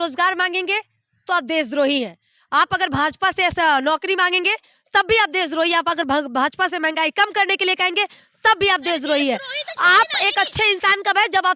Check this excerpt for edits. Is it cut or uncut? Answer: uncut